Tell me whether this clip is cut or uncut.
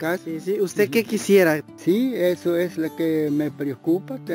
cut